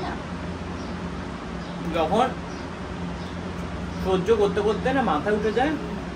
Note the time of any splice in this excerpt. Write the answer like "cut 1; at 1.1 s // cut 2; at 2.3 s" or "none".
none